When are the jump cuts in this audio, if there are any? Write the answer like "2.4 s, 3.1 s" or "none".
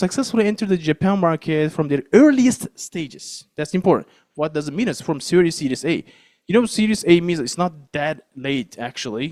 none